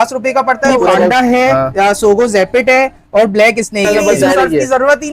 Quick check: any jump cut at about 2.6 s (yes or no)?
no